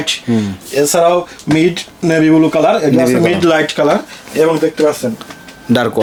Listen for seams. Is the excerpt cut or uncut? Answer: uncut